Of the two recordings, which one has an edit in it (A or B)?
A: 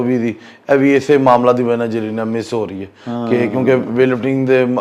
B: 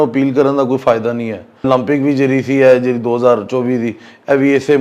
B